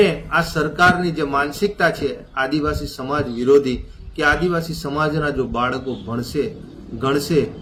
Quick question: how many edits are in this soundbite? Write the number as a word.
zero